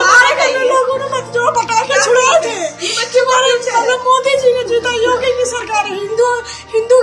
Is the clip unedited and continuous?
yes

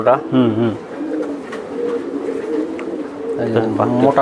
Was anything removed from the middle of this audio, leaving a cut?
no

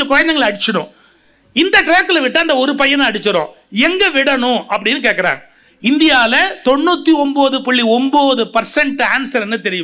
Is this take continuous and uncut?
yes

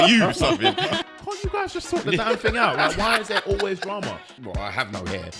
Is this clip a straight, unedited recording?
no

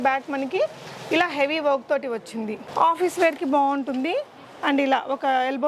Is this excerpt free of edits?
yes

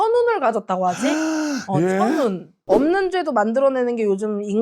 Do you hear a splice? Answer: yes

